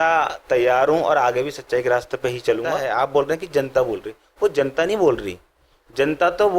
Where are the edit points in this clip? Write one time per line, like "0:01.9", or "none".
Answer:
0:02.8